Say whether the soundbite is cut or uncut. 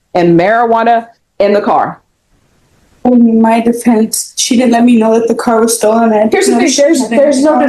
uncut